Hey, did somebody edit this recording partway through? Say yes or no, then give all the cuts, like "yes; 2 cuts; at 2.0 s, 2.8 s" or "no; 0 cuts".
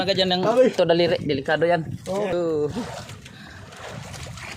yes; 1 cut; at 2.3 s